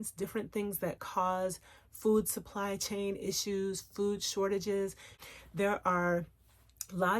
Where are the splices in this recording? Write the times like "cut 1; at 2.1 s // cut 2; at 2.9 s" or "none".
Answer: cut 1; at 5.1 s